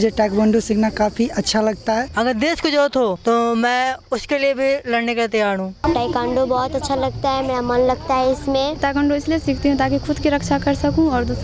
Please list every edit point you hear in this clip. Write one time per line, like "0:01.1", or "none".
0:02.1
0:03.2
0:05.8
0:08.8